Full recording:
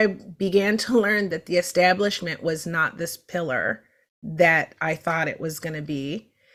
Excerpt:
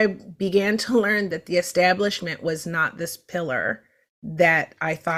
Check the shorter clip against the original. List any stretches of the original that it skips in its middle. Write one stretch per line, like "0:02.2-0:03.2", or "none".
none